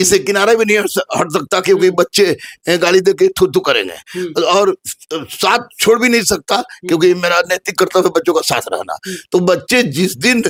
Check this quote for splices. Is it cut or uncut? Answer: uncut